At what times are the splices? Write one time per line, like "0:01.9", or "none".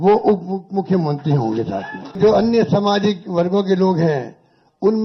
0:02.2